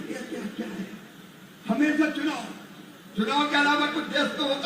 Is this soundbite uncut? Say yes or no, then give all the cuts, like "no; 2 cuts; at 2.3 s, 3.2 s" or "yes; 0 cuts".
yes; 0 cuts